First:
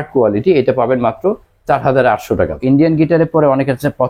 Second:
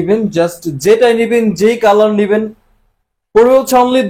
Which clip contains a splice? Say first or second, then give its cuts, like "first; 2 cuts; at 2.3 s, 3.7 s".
first; 1 cut; at 2.6 s